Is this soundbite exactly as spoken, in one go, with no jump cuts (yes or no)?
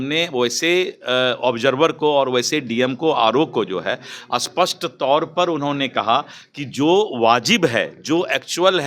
yes